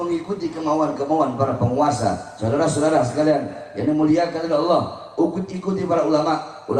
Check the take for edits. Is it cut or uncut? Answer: uncut